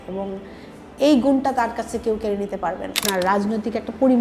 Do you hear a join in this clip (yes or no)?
yes